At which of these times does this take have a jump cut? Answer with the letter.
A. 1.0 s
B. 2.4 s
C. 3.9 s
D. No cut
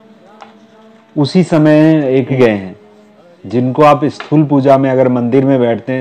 B